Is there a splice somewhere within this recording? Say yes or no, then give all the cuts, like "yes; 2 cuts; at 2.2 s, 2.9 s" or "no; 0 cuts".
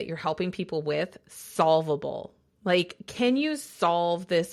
no; 0 cuts